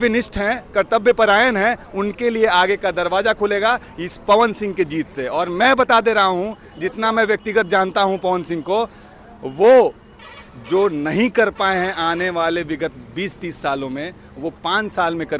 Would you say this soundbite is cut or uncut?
uncut